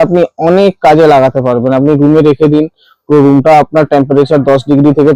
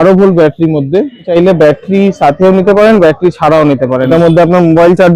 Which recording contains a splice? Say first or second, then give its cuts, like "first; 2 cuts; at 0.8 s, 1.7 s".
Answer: second; 2 cuts; at 1.3 s, 4.1 s